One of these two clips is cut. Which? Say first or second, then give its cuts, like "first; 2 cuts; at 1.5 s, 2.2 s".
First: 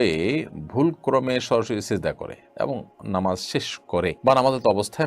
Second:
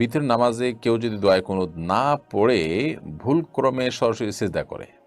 first; 1 cut; at 4.2 s